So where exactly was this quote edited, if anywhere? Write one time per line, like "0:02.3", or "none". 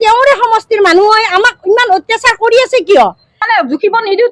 0:03.4